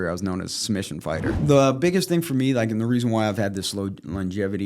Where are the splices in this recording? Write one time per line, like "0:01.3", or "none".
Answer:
0:01.3